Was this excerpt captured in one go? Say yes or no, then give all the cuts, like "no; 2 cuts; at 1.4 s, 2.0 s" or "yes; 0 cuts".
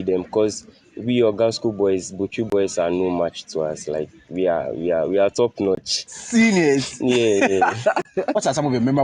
no; 1 cut; at 8.1 s